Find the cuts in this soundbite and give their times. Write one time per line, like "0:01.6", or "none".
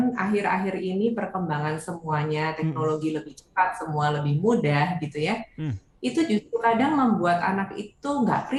none